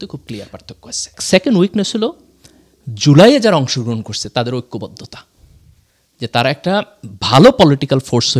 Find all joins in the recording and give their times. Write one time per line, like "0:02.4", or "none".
0:01.1

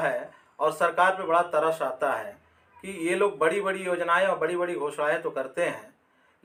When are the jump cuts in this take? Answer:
none

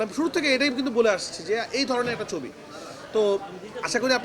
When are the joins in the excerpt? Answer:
none

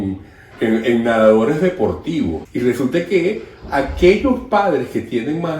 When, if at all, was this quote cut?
0:02.4

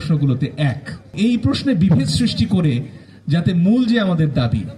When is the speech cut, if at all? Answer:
0:01.1

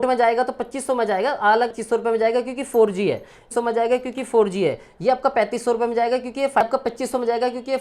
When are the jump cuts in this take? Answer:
0:01.8
0:03.4
0:06.6

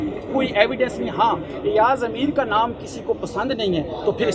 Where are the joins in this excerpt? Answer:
none

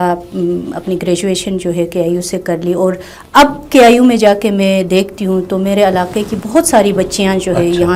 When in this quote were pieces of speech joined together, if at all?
none

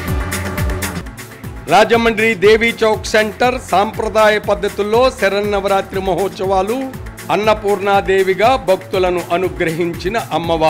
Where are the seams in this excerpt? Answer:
0:00.9

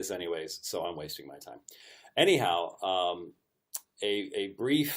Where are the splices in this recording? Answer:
0:01.0

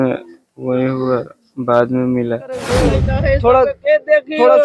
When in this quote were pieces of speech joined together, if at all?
0:02.8

